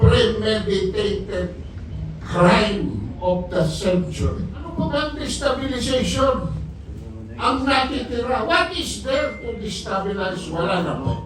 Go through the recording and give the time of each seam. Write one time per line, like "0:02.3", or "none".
0:04.7